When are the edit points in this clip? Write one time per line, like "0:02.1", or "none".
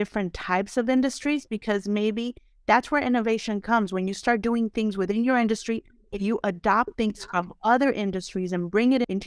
none

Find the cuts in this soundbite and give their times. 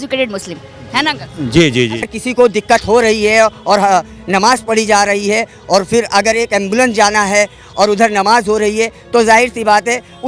0:02.1

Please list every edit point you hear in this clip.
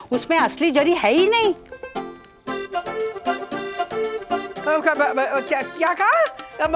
0:01.6
0:04.6

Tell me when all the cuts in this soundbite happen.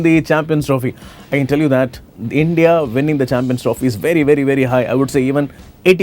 none

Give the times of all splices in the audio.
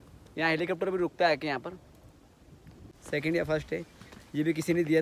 0:02.8

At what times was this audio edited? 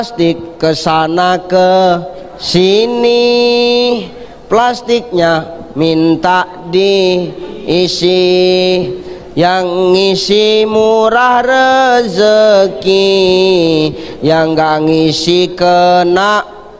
none

